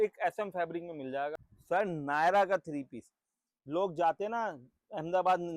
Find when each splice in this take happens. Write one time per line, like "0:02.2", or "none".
none

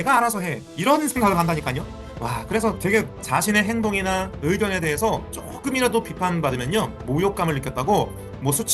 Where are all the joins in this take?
0:03.1

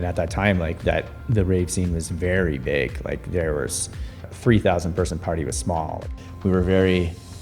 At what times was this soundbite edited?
0:04.2
0:06.1

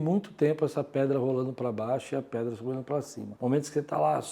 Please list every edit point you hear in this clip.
0:03.2

